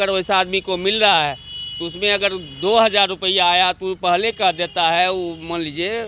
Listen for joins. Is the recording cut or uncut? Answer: uncut